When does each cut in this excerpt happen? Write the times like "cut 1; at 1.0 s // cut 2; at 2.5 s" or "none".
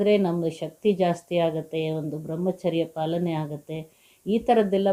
none